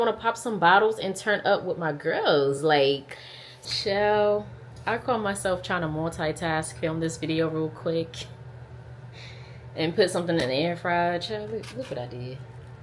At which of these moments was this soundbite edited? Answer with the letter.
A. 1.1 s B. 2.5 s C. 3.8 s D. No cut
C